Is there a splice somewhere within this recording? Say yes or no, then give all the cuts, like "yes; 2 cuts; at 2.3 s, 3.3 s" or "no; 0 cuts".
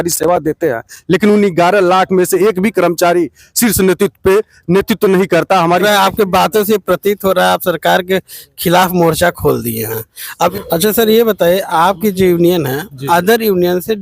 yes; 2 cuts; at 5.8 s, 10.2 s